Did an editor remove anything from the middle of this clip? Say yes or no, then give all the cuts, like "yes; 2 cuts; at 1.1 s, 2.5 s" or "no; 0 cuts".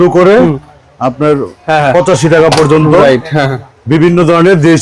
no; 0 cuts